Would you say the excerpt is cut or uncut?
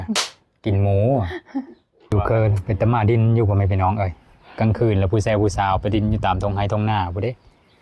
cut